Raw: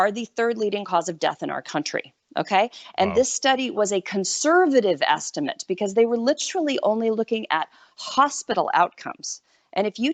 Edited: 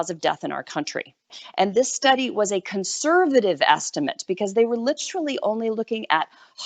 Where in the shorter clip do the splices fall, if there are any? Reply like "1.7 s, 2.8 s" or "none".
1.3 s